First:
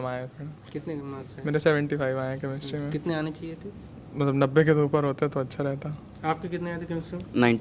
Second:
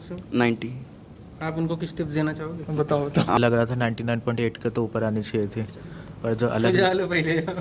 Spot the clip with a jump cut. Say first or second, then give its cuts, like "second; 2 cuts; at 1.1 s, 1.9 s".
second; 1 cut; at 3.4 s